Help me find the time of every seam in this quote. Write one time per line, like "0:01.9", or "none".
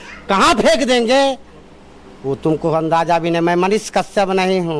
none